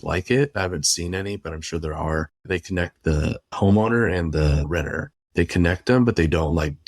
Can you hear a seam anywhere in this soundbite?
yes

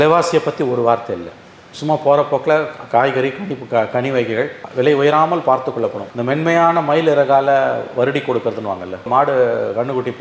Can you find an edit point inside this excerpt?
no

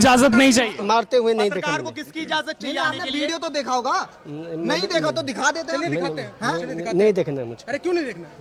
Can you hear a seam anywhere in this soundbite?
no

